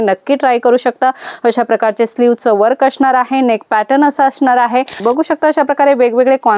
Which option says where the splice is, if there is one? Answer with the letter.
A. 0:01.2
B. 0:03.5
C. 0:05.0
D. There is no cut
C